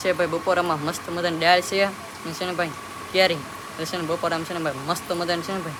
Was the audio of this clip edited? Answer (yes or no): no